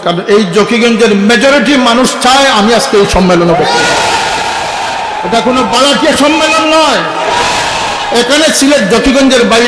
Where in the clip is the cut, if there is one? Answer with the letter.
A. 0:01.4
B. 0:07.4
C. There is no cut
C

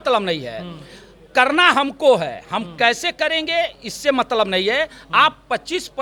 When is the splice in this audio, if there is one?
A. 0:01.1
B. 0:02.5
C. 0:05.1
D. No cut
D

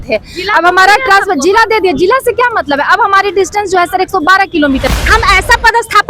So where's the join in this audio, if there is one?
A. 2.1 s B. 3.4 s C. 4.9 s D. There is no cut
C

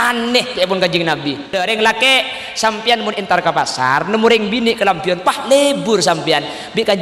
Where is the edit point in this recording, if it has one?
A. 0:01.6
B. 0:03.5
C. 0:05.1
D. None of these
A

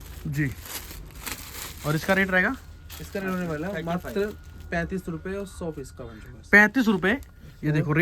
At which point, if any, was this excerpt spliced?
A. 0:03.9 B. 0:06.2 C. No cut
C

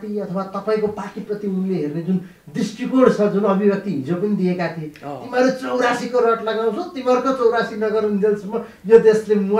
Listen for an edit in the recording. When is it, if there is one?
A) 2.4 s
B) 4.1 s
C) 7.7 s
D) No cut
D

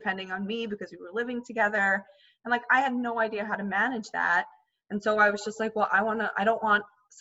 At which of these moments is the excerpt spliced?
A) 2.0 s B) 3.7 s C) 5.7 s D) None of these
D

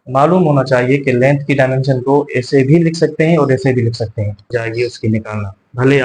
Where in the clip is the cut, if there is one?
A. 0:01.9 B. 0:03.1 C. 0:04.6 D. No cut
C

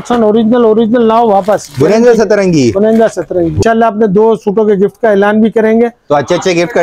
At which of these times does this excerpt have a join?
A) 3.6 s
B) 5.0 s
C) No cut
A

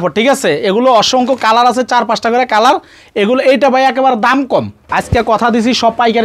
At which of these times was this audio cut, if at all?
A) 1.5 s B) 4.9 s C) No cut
B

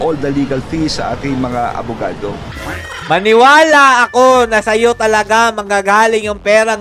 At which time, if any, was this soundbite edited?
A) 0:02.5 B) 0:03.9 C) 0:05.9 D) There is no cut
A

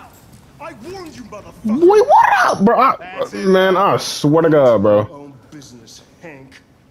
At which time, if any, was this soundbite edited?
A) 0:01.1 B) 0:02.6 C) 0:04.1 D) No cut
D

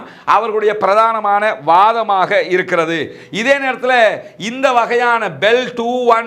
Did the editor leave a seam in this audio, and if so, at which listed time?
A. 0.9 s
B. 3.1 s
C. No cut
C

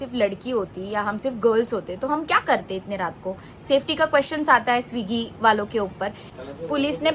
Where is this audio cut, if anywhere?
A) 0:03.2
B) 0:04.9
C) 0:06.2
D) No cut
C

